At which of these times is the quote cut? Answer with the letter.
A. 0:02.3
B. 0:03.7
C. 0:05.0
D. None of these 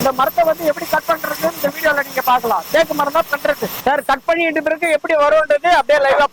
B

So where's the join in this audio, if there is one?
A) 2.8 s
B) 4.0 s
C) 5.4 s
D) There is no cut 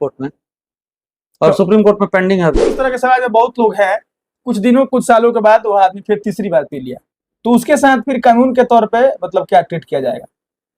A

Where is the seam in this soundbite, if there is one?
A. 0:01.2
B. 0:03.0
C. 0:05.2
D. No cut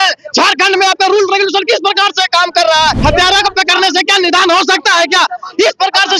B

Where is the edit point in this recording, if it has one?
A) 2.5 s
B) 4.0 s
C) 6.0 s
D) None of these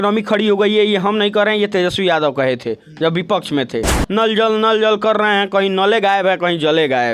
B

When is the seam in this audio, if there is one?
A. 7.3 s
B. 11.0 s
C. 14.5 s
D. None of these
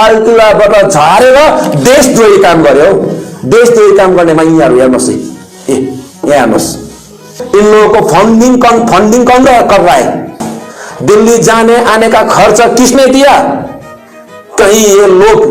A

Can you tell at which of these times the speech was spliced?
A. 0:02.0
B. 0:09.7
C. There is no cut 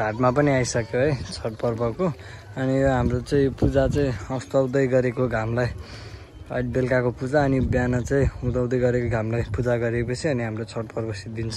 C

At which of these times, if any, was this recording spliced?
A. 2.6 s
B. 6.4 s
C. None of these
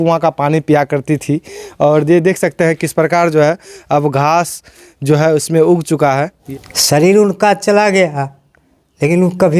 B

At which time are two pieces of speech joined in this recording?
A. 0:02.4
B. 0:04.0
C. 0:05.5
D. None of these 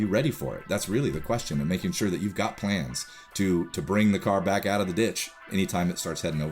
C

